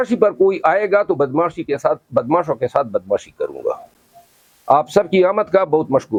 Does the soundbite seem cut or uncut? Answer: uncut